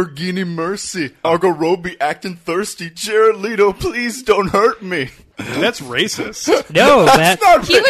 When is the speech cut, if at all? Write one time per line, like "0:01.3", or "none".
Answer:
0:01.2
0:05.3